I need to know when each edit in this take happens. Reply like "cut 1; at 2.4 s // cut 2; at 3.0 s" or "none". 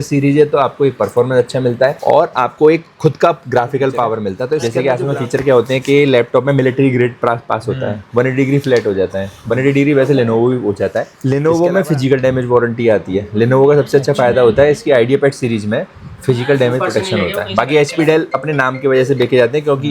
cut 1; at 4.6 s // cut 2; at 11.1 s